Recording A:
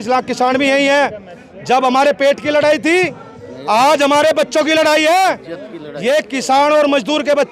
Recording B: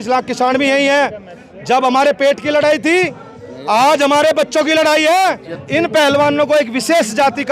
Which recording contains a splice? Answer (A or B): B